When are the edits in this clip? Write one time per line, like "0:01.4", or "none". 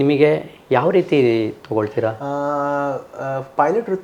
none